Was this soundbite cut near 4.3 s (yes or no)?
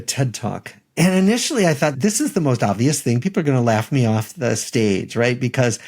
no